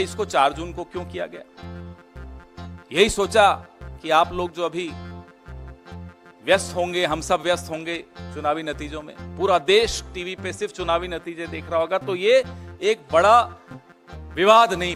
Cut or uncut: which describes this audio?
uncut